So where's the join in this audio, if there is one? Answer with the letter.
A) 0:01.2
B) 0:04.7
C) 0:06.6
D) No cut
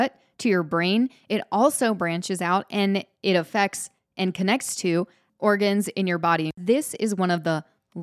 C